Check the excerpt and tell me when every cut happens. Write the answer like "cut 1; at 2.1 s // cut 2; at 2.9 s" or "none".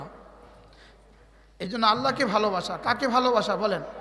none